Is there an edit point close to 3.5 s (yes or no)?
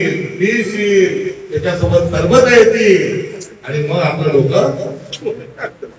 no